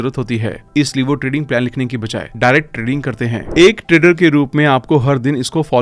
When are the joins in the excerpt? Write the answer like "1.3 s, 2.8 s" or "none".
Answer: 3.4 s